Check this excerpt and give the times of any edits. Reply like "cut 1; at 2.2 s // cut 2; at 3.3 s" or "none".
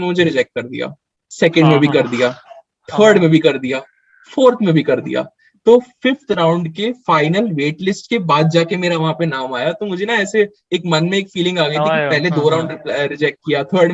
none